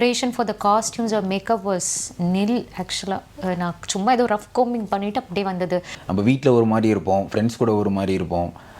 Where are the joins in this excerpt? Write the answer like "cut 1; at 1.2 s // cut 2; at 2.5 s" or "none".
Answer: cut 1; at 6.0 s